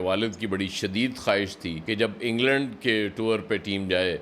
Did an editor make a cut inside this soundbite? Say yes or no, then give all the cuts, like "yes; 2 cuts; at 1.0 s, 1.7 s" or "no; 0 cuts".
no; 0 cuts